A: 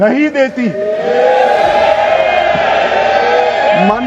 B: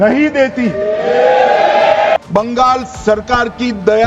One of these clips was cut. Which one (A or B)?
B